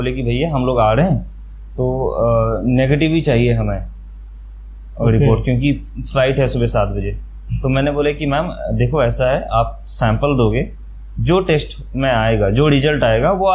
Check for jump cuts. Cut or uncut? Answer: uncut